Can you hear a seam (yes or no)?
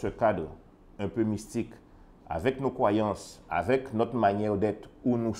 no